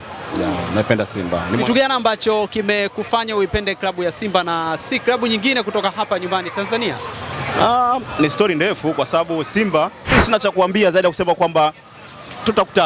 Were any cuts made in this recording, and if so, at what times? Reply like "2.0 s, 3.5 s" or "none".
10.1 s